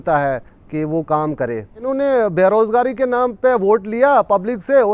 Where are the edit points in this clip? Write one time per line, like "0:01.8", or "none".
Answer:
0:01.7